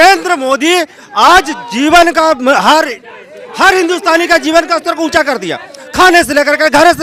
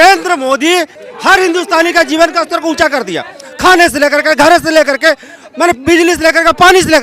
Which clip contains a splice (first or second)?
second